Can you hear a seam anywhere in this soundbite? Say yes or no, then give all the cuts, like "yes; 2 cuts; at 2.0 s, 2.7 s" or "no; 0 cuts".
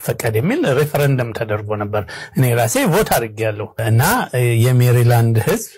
yes; 1 cut; at 3.8 s